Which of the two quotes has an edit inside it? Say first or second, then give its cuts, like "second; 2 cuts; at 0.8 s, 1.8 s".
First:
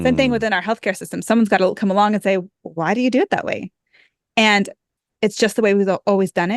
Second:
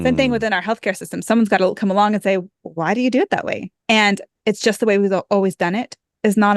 second; 2 cuts; at 3.7 s, 4.3 s